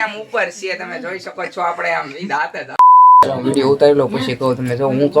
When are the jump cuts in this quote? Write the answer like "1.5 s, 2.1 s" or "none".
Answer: 2.6 s, 3.3 s